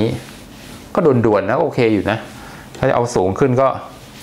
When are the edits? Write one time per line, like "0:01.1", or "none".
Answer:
none